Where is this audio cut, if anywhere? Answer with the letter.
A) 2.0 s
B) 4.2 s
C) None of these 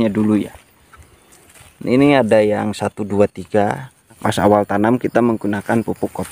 B